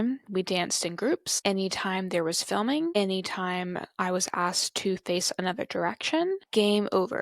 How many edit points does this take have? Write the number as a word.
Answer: three